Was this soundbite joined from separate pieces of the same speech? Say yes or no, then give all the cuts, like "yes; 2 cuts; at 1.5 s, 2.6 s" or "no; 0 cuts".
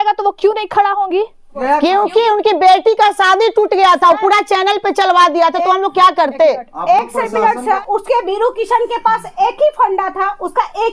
yes; 2 cuts; at 1.6 s, 7.8 s